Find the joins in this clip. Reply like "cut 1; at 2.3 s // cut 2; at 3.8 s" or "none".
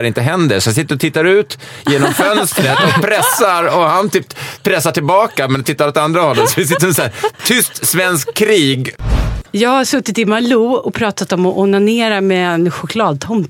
cut 1; at 7.4 s // cut 2; at 9.0 s